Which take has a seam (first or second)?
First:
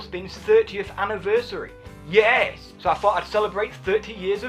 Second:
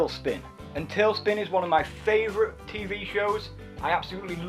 second